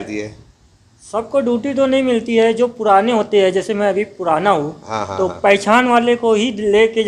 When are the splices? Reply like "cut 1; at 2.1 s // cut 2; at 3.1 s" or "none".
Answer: none